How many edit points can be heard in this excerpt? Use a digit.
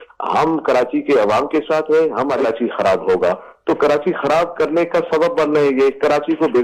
1